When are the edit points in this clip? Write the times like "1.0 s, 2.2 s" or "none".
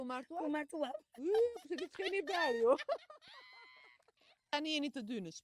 4.5 s